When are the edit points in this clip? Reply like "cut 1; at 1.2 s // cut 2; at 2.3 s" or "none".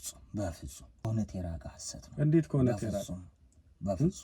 cut 1; at 1.0 s